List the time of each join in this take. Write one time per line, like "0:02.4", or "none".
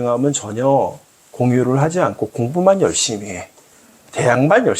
none

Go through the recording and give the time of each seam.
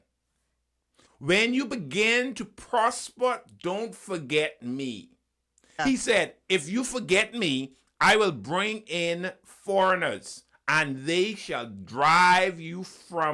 0:01.0
0:05.8

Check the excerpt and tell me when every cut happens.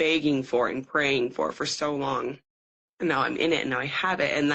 none

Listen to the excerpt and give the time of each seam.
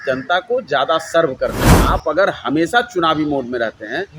0:01.7

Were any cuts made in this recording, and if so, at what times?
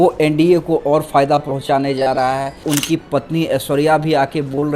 0:02.6

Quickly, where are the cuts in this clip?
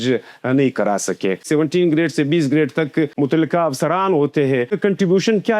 0:01.4
0:03.1
0:04.7

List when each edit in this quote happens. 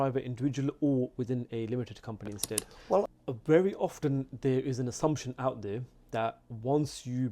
0:03.1

